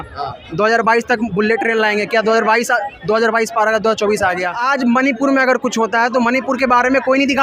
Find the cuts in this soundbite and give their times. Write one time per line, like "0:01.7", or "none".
0:04.6